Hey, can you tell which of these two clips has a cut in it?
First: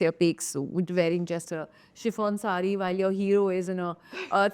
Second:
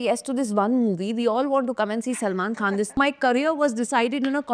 second; 1 cut; at 3.0 s

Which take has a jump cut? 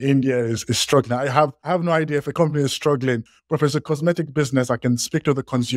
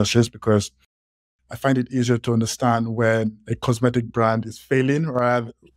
first; 2 cuts; at 2.0 s, 3.3 s

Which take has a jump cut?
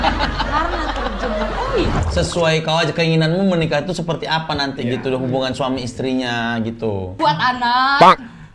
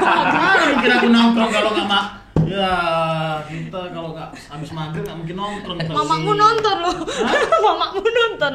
first; 2 cuts; at 2.0 s, 7.2 s

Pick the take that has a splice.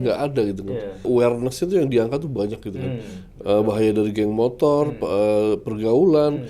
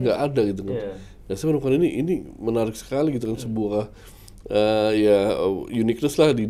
first; 1 cut; at 1.1 s

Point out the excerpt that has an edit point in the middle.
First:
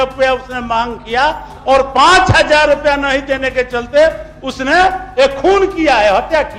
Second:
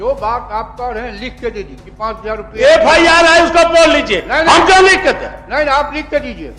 second; 1 cut; at 1.8 s

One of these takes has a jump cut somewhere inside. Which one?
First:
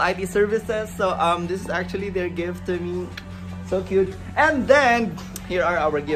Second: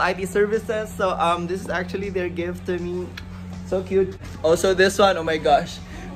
second; 1 cut; at 4.2 s

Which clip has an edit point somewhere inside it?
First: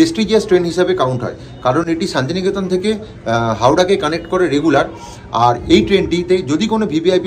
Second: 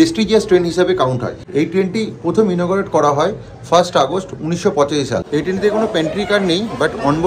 second; 2 cuts; at 1.4 s, 5.2 s

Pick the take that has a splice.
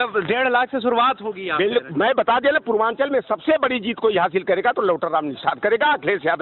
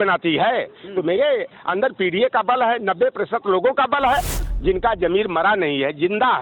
second; 1 cut; at 4.4 s

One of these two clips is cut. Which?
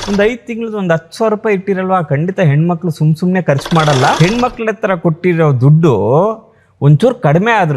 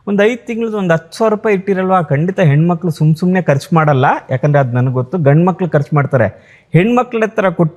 first; 1 cut; at 4.2 s

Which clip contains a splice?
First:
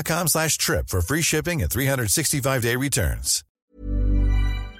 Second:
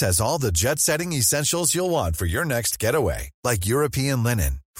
first; 1 cut; at 3.6 s

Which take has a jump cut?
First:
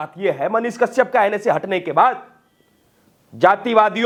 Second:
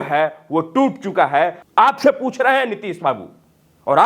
second; 1 cut; at 1.6 s

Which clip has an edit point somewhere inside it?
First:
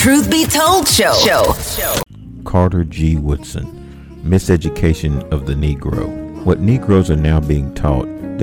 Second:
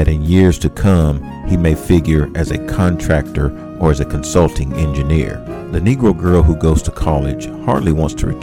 first; 1 cut; at 2.1 s

